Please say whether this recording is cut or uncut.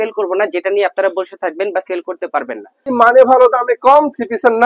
cut